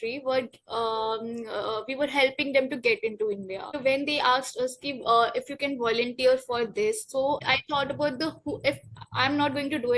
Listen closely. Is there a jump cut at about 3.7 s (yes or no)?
yes